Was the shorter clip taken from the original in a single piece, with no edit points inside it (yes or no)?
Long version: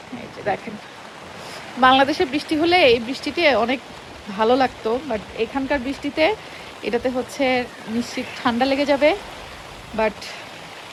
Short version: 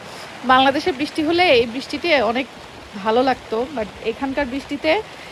yes